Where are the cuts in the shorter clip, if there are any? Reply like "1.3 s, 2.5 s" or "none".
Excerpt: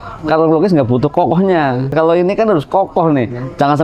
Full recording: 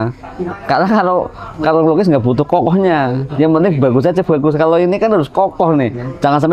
1.9 s